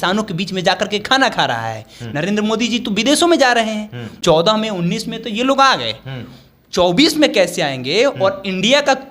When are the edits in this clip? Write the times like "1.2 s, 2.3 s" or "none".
4.0 s